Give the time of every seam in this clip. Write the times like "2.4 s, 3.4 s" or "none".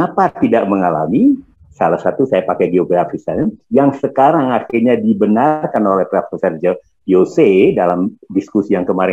none